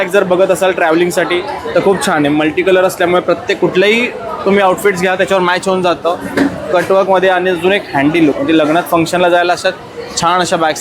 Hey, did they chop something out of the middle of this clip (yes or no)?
no